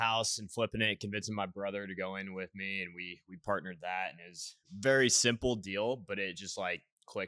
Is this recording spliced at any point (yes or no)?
no